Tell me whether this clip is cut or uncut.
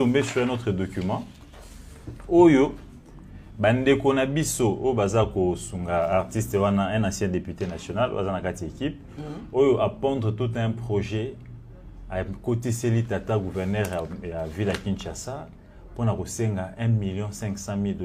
uncut